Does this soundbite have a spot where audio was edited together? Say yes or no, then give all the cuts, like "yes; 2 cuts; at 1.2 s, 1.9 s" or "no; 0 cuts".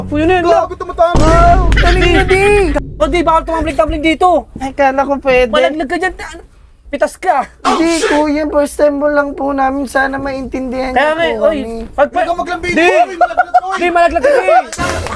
no; 0 cuts